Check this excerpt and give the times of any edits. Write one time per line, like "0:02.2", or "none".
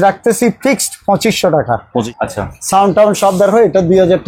0:02.1